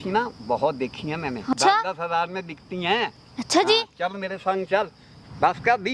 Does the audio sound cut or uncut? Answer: cut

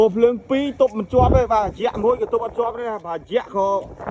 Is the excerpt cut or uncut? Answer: uncut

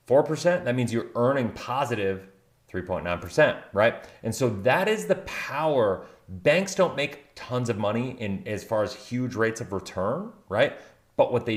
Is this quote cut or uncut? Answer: uncut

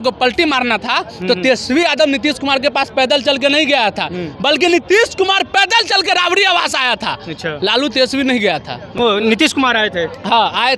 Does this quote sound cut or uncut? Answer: uncut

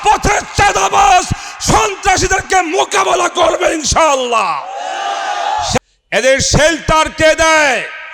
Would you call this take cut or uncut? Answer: cut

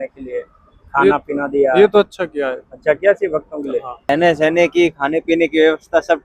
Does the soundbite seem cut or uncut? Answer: cut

